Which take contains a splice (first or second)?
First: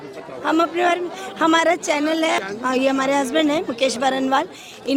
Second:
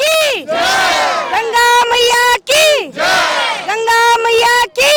first